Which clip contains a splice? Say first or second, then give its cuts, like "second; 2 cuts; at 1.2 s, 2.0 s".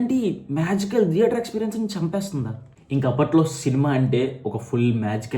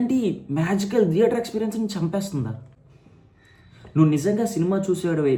first; 1 cut; at 2.8 s